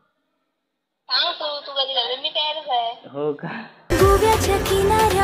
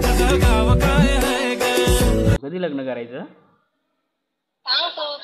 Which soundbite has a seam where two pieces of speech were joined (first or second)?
second